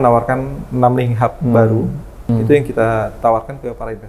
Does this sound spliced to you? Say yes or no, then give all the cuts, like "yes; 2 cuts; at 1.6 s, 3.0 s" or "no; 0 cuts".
yes; 1 cut; at 2.3 s